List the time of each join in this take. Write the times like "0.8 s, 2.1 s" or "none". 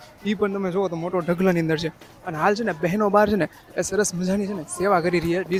none